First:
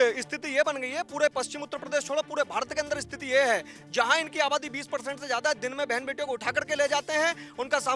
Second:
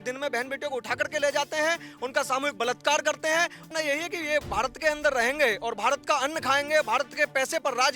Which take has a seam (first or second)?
second